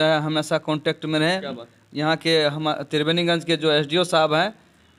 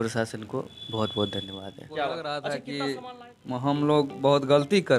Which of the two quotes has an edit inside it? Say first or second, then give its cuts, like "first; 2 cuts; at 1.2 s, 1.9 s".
second; 1 cut; at 2.3 s